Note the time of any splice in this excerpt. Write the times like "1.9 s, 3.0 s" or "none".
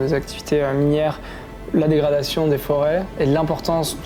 none